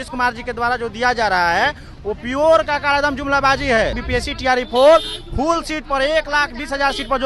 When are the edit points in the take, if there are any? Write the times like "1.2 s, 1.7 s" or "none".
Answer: 4.0 s